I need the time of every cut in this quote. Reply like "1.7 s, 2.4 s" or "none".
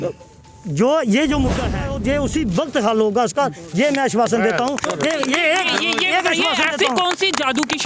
2.0 s